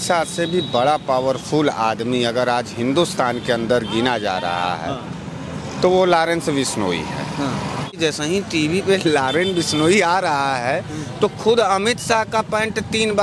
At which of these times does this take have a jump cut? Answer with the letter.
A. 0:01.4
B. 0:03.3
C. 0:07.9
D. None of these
C